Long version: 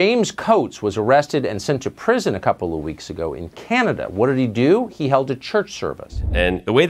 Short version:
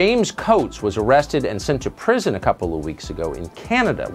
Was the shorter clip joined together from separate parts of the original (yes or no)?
no